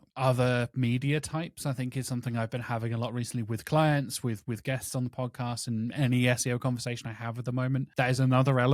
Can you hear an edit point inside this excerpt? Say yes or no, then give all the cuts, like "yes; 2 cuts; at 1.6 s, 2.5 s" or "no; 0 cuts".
no; 0 cuts